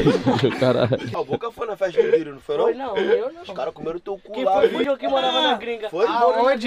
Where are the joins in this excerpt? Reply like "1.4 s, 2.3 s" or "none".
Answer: 1.1 s, 4.8 s